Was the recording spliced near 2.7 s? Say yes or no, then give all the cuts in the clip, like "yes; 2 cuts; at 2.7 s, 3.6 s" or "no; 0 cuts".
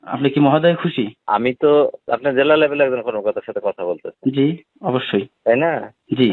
no; 2 cuts; at 1.1 s, 4.7 s